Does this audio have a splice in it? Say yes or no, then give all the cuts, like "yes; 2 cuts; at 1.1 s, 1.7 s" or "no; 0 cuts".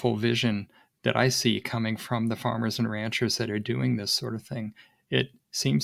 no; 0 cuts